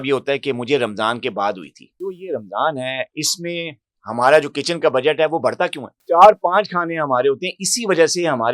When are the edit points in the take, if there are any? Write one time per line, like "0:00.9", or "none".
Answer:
0:02.0
0:05.9